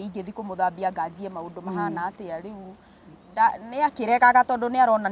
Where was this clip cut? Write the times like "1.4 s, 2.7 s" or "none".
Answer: none

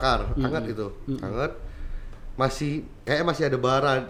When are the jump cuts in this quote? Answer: none

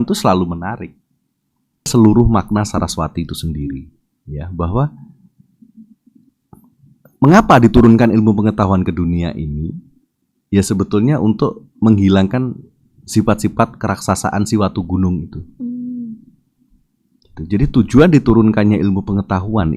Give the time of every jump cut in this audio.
1.9 s

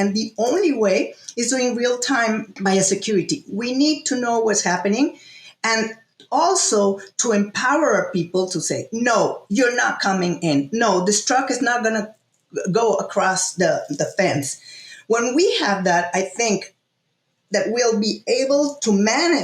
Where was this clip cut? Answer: 2.5 s

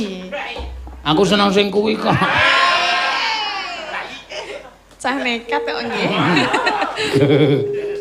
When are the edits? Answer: none

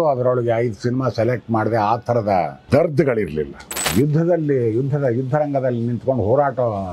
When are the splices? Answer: 2.6 s, 3.8 s

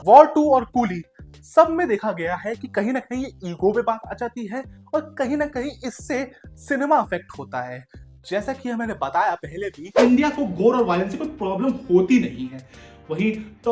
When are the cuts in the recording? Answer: 9.9 s

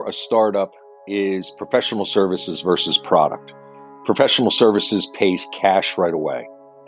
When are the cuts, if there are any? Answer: none

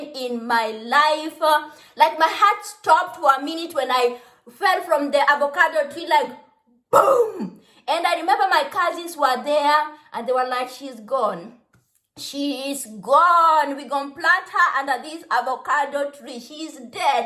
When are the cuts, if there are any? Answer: none

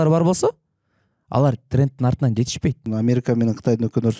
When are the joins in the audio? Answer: 2.8 s

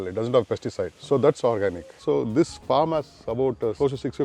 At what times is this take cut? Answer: 1.0 s, 2.0 s

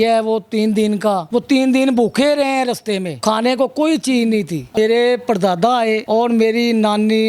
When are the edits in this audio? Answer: 4.8 s

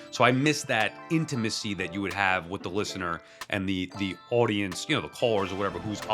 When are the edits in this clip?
none

